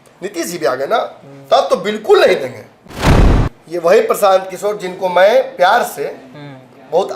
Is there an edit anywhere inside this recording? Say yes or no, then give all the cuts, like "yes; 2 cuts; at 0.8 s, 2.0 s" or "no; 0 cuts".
yes; 1 cut; at 3.3 s